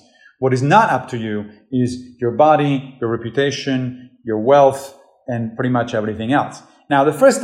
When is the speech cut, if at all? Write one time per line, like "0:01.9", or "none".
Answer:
none